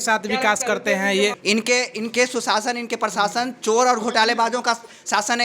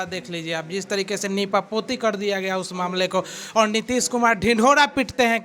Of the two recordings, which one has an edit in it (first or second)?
first